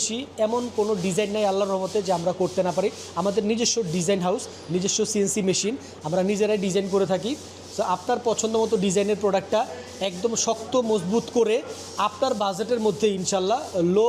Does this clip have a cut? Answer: no; 0 cuts

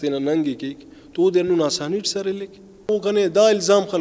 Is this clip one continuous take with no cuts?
no; 1 cut; at 2.8 s

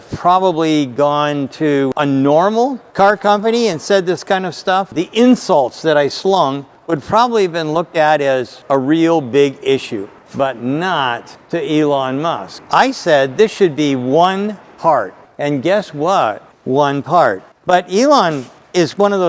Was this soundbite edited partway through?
yes; 6 cuts; at 1.9 s, 2.8 s, 4.9 s, 8.5 s, 10.2 s, 15.2 s

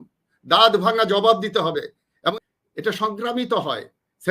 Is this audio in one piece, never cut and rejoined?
no; 1 cut; at 2.3 s

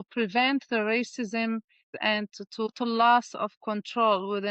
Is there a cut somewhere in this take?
yes; 1 cut; at 2.7 s

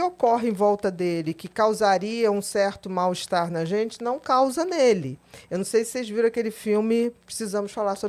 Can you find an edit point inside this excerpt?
no; 0 cuts

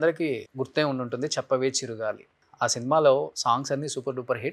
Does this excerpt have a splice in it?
no; 0 cuts

